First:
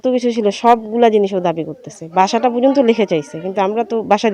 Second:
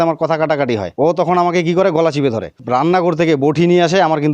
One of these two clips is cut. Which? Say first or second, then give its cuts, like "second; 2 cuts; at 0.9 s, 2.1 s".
second; 2 cuts; at 0.9 s, 2.6 s